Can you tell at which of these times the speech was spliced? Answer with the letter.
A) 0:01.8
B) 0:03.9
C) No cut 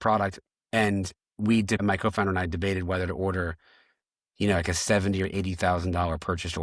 A